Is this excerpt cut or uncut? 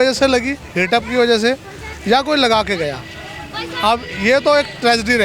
uncut